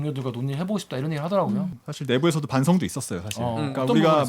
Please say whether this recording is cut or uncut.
cut